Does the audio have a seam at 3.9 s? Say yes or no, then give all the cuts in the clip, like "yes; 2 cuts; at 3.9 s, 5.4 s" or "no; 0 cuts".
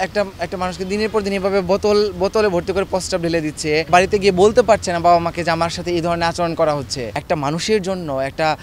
yes; 2 cuts; at 3.9 s, 7.1 s